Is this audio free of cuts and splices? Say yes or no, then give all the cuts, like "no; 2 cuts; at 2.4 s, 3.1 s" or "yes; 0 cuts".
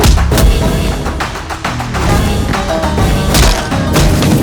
yes; 0 cuts